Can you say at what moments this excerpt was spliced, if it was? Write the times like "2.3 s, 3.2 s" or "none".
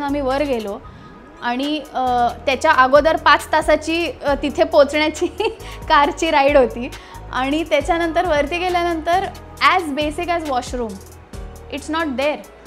none